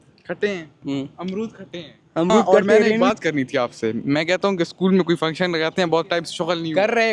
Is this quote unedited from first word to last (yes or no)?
no